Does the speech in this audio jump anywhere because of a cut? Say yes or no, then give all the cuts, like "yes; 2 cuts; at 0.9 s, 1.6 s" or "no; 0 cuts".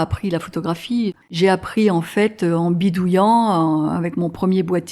yes; 1 cut; at 1.2 s